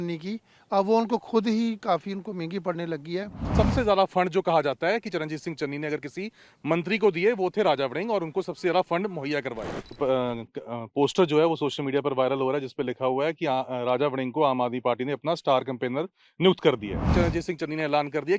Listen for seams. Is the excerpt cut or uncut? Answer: cut